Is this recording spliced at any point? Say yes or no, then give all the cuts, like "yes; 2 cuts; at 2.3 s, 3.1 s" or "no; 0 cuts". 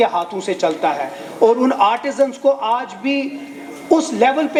no; 0 cuts